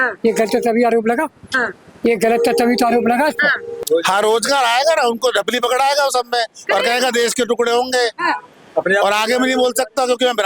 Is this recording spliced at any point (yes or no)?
yes